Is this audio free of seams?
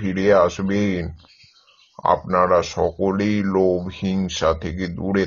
yes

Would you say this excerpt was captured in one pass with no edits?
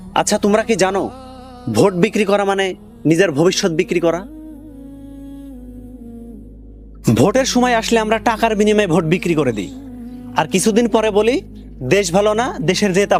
yes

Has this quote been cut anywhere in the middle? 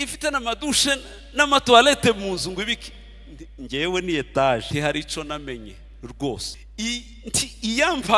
yes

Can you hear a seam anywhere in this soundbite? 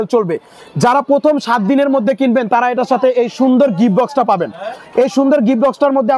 no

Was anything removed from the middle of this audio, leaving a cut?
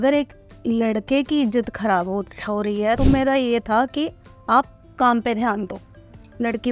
yes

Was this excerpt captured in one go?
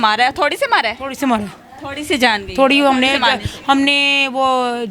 yes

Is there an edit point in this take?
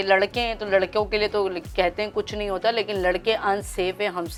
no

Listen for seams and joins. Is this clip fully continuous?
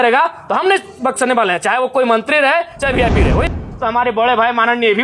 no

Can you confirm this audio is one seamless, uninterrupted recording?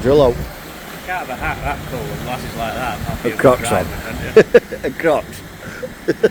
yes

